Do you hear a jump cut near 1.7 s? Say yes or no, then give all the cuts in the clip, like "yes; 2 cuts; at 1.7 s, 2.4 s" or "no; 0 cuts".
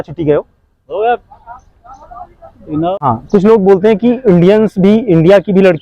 no; 1 cut; at 2.9 s